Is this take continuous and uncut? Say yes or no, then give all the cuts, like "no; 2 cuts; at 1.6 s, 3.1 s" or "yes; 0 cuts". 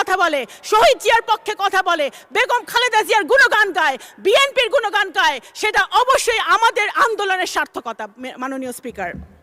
yes; 0 cuts